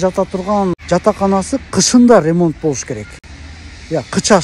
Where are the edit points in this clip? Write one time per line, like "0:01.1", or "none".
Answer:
none